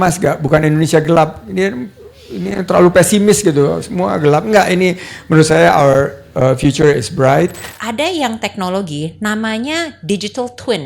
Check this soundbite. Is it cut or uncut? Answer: cut